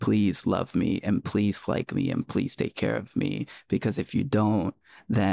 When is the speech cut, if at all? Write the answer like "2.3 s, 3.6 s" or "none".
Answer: none